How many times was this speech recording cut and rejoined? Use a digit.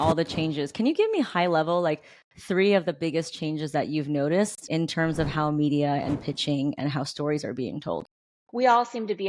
0